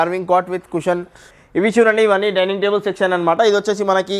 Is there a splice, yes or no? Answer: yes